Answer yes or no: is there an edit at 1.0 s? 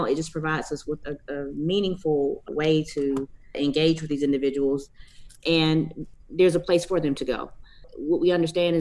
yes